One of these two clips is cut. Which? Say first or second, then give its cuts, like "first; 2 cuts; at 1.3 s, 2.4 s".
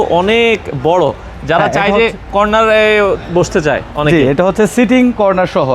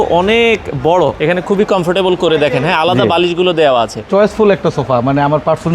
second; 2 cuts; at 1.2 s, 4.0 s